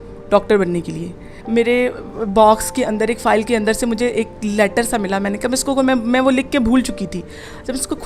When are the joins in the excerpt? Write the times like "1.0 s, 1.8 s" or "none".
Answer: 1.2 s